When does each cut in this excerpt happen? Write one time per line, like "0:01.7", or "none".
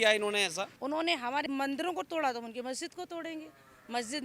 0:01.3